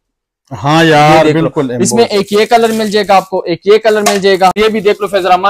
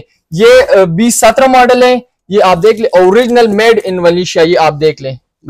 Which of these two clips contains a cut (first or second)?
first